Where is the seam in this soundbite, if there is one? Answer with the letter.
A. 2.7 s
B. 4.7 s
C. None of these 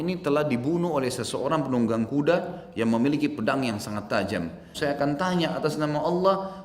B